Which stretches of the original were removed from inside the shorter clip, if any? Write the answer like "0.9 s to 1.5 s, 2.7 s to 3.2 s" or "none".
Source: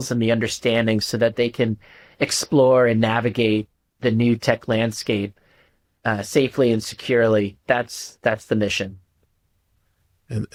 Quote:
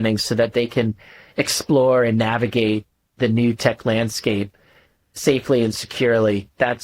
6.0 s to 6.2 s